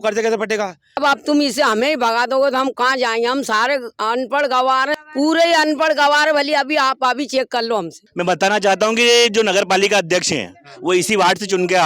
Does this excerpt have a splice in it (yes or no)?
yes